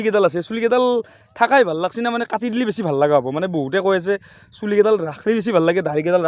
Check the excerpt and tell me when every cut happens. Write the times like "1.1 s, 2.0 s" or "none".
none